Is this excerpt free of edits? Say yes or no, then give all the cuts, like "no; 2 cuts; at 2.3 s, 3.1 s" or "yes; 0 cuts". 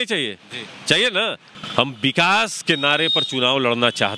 no; 1 cut; at 1.5 s